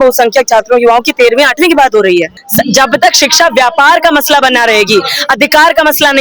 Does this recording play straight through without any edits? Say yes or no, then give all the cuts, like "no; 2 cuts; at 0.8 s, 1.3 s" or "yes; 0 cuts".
no; 1 cut; at 2.3 s